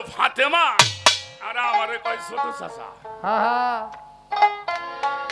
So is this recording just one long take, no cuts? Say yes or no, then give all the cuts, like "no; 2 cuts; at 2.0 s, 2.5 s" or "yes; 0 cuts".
yes; 0 cuts